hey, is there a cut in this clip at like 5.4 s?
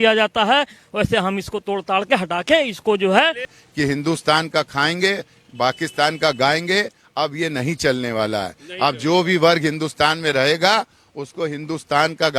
no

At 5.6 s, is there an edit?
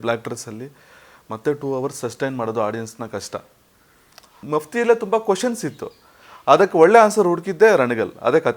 no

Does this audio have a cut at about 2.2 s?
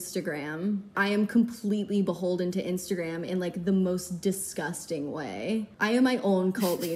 no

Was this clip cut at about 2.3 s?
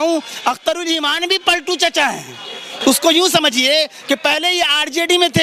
no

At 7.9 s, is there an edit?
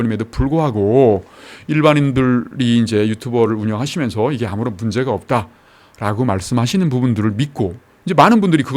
yes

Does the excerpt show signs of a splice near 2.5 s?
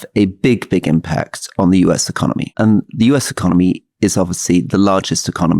yes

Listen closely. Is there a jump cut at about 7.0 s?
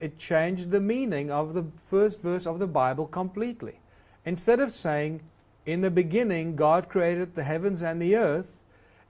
no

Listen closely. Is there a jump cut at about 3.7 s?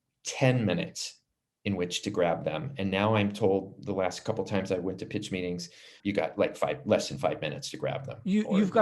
no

